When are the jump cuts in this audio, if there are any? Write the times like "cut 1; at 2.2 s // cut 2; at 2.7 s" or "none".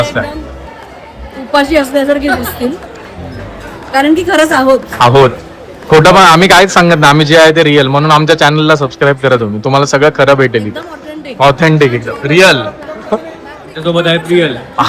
none